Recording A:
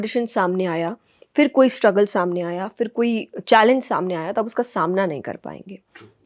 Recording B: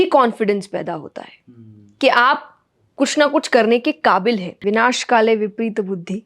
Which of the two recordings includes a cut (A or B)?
B